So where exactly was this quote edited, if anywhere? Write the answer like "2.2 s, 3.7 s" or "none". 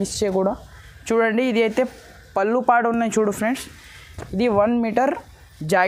none